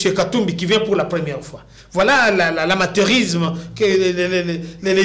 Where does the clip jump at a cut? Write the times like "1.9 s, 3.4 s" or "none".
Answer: none